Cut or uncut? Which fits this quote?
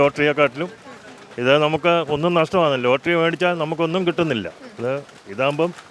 uncut